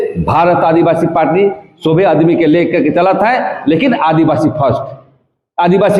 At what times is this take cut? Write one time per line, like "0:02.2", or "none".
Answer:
none